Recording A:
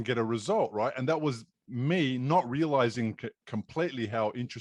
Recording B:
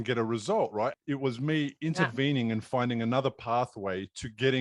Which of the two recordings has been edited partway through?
B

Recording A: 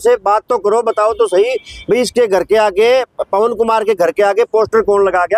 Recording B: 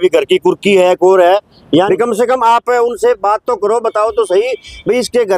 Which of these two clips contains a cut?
B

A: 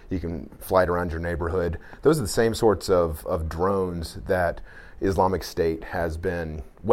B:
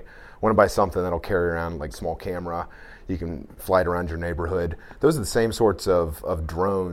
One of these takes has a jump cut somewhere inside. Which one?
B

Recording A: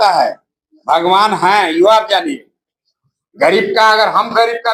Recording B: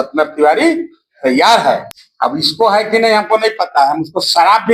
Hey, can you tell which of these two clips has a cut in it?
B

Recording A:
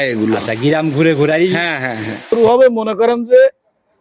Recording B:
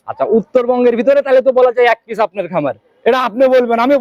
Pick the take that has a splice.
A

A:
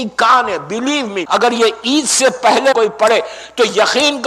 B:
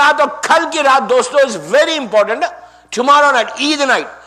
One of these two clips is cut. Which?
A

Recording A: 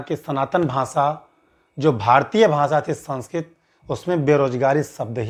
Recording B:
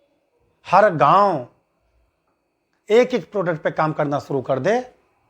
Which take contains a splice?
B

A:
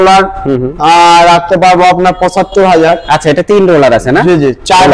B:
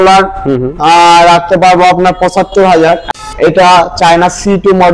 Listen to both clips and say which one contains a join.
B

